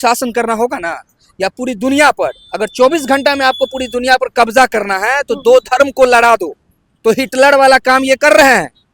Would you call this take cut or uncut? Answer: uncut